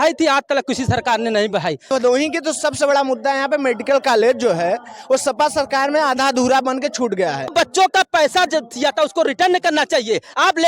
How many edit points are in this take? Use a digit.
2